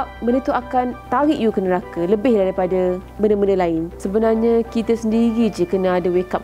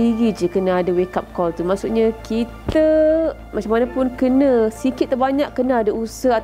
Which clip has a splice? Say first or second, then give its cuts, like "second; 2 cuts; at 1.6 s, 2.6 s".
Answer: first; 3 cuts; at 1.0 s, 3.1 s, 4.0 s